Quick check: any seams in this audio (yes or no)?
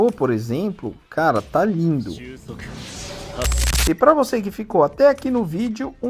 yes